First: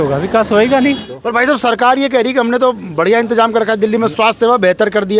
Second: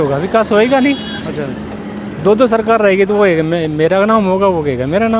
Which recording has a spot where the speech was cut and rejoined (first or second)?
first